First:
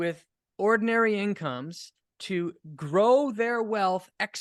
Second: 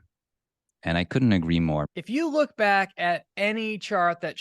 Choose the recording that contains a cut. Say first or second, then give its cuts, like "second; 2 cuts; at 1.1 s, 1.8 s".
second; 1 cut; at 1.9 s